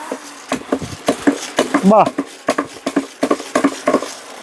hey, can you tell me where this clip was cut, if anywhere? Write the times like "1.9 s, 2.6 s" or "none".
none